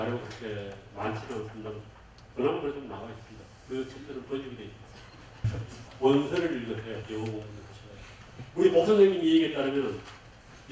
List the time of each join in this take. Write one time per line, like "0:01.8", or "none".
0:05.5